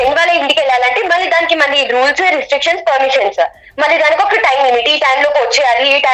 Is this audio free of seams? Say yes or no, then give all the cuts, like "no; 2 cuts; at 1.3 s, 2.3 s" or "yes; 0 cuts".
yes; 0 cuts